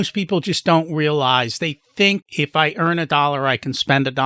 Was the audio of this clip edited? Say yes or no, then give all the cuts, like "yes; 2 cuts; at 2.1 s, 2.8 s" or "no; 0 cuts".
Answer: no; 0 cuts